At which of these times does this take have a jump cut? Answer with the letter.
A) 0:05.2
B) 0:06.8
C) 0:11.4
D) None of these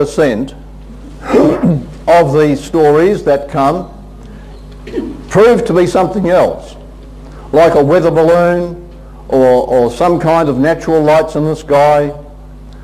C